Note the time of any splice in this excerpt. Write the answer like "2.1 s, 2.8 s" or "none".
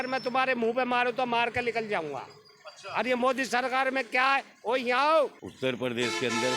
5.4 s